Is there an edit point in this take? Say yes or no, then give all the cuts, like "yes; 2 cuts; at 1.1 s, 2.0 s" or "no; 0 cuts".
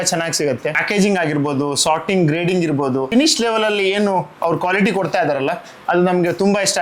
no; 0 cuts